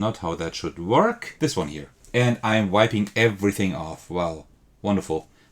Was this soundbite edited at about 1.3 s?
yes; 1 cut; at 1.3 s

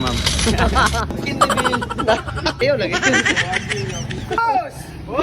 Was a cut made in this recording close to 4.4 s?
yes; 3 cuts; at 1.1 s, 2.6 s, 4.4 s

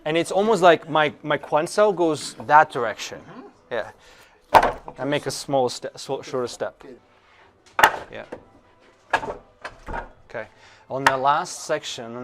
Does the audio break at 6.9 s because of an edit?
yes; 1 cut; at 6.9 s

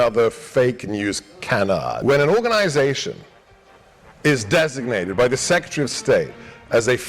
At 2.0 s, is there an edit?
yes; 1 cut; at 2.0 s

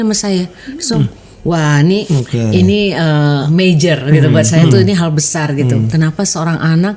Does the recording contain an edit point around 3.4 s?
yes; 2 cuts; at 2.1 s, 3.4 s

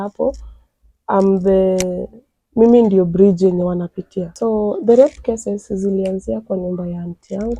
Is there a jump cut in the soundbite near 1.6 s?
no; 1 cut; at 4.3 s

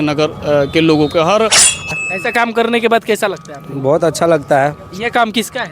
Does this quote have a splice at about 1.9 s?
yes; 1 cut; at 1.9 s

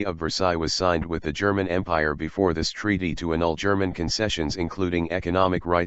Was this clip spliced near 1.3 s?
yes; 1 cut; at 1.3 s

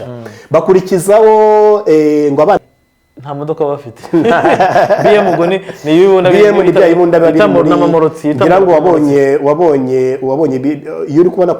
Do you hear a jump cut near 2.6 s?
yes; 1 cut; at 2.6 s

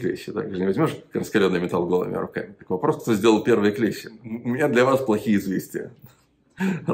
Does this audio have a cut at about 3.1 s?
no; 1 cut; at 4.4 s

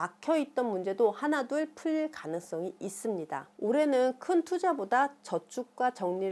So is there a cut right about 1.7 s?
no; 1 cut; at 3.5 s

